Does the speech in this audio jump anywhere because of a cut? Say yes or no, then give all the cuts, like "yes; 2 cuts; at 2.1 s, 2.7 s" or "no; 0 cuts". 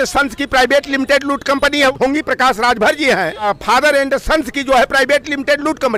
yes; 2 cuts; at 2.0 s, 3.5 s